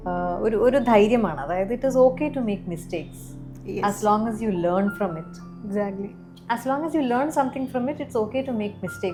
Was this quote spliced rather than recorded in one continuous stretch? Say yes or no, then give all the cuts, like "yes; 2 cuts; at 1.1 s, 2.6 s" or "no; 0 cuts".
no; 0 cuts